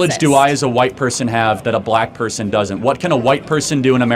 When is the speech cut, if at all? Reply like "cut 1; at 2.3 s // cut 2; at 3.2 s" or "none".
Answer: none